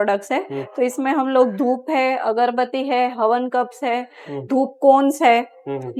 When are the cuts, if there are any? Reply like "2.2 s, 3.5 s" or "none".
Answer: none